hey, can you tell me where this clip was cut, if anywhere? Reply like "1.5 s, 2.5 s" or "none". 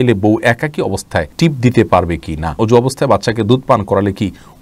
1.3 s, 2.6 s